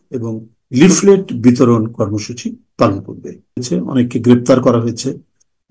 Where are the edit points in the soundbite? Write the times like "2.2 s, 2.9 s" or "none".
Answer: 3.6 s